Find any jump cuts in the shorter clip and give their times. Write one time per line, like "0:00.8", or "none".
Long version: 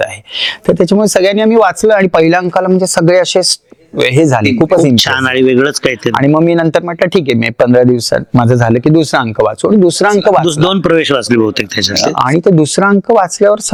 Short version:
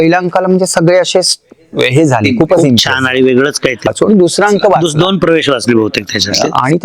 0:03.9